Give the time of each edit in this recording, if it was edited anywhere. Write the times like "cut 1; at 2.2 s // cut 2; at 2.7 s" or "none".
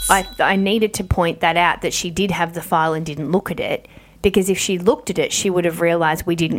none